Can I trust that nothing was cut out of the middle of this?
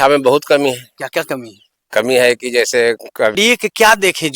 no; 1 cut; at 3.3 s

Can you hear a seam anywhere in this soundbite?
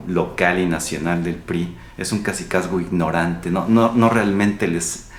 no; 0 cuts

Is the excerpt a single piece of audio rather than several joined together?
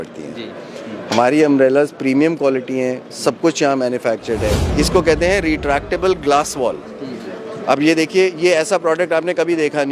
no; 1 cut; at 4.6 s

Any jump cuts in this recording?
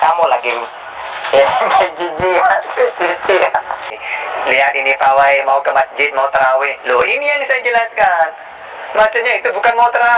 yes; 1 cut; at 3.9 s

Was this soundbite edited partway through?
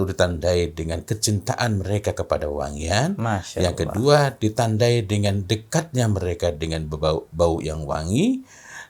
no; 0 cuts

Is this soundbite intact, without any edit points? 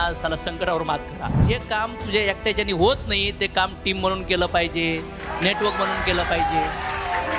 no; 1 cut; at 1.4 s

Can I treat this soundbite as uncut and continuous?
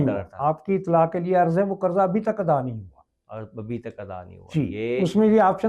yes; 0 cuts

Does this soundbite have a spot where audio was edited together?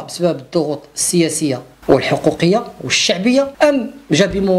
yes; 1 cut; at 3.5 s

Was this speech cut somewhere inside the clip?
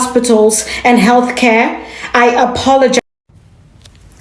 yes; 1 cut; at 3.0 s

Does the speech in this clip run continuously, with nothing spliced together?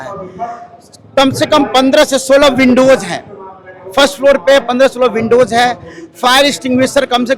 yes; 0 cuts

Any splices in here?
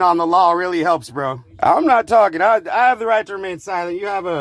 yes; 1 cut; at 1.4 s

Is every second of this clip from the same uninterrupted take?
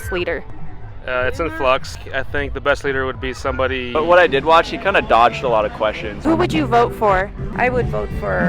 no; 4 cuts; at 2.0 s, 3.8 s, 6.1 s, 7.5 s

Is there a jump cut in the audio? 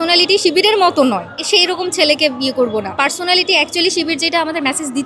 yes; 2 cuts; at 1.3 s, 2.9 s

